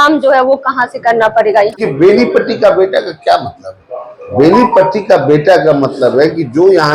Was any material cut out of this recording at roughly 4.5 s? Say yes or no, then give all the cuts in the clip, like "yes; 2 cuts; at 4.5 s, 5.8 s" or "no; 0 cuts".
no; 1 cut; at 1.7 s